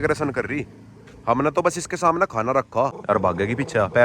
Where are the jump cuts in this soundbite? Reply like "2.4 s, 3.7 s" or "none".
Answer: 3.0 s